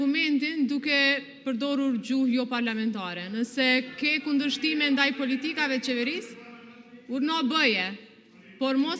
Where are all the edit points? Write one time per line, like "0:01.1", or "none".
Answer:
none